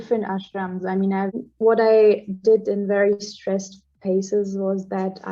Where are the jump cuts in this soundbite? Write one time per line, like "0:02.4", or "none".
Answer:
0:01.4